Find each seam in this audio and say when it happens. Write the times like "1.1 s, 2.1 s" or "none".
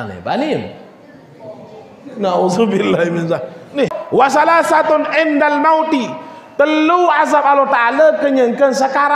4.0 s